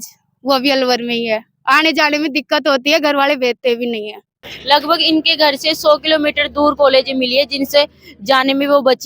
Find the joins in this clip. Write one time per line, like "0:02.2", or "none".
0:04.5